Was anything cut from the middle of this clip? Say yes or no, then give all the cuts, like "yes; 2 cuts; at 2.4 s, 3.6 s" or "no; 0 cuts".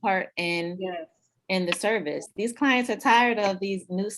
yes; 1 cut; at 2.3 s